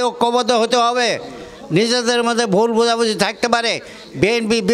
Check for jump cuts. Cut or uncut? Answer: uncut